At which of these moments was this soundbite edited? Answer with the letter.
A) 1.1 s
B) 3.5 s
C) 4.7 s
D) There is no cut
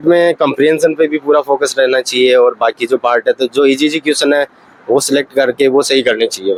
D